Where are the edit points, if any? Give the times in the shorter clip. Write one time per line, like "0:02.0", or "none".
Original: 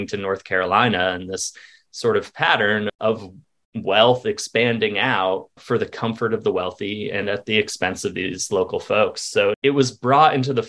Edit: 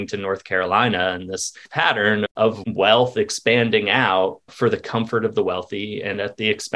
0:01.7
0:02.6